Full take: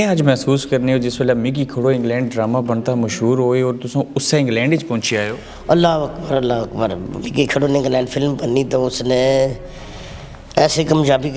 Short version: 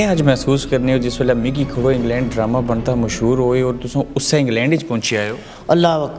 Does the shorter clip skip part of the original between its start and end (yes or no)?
no